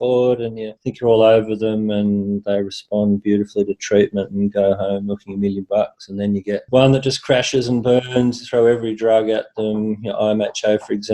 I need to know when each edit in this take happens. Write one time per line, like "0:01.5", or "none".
none